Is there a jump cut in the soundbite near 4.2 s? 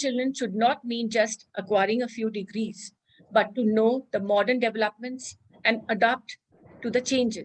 no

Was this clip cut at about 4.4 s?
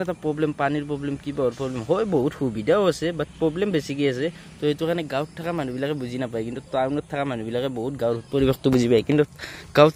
no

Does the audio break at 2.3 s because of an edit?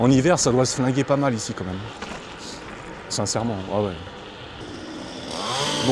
no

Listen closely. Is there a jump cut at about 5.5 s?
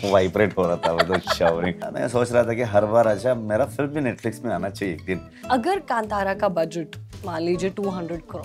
yes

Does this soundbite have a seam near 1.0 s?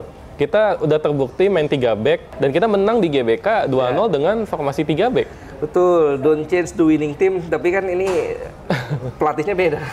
no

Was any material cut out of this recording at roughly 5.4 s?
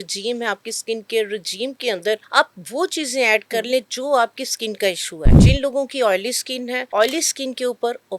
yes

